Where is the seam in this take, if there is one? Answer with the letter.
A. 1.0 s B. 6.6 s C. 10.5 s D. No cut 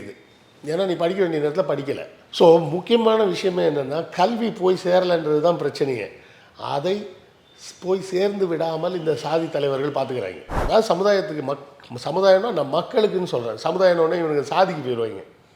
C